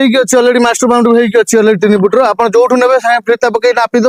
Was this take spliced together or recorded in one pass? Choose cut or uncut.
uncut